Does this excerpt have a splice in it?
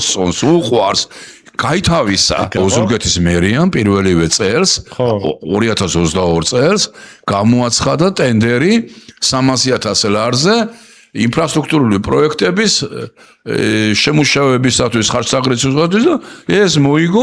yes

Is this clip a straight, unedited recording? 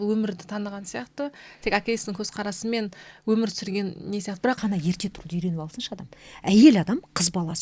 no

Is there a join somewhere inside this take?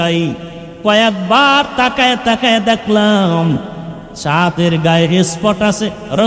no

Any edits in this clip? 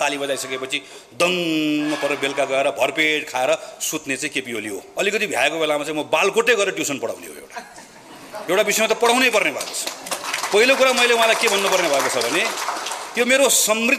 yes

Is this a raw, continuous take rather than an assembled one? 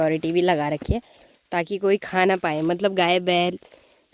yes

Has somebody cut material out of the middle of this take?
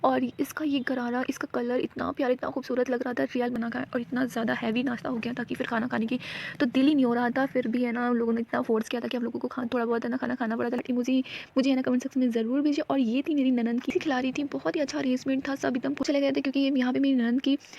yes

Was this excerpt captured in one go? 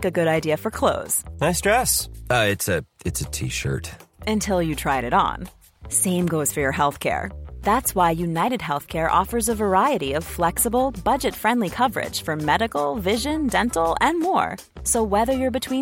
yes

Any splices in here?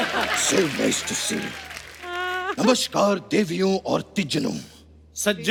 no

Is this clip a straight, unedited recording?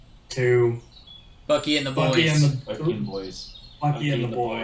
yes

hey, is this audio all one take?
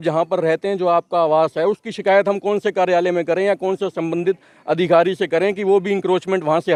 yes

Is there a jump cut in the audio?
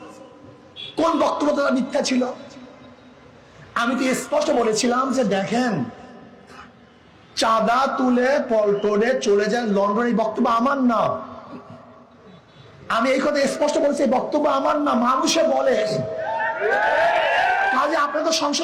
no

